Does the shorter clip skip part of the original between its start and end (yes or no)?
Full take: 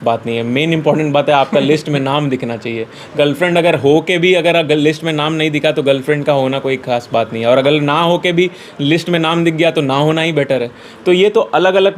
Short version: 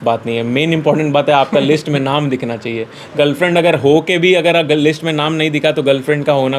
no